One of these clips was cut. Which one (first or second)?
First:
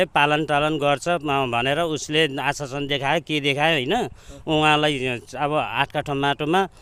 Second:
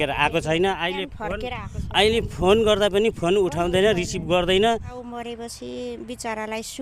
second